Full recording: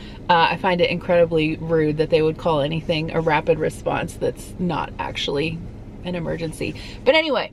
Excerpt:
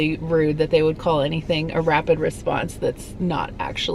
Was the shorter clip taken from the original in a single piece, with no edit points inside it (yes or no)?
yes